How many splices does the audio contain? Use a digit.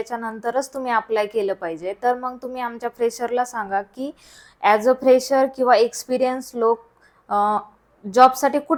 0